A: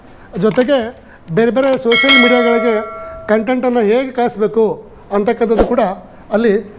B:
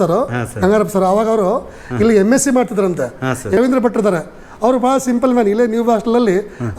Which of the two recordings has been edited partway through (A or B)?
B